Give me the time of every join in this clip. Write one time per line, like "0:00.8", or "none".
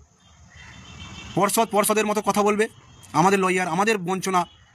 none